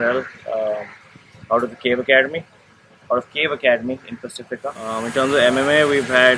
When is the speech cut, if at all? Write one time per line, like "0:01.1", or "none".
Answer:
0:04.9